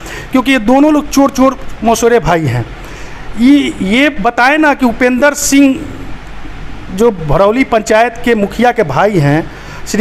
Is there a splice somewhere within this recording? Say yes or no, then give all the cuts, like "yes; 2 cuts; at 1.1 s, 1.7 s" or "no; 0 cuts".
no; 0 cuts